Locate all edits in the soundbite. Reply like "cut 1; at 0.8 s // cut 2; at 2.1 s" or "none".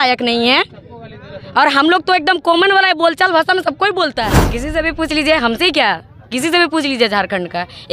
cut 1; at 4.4 s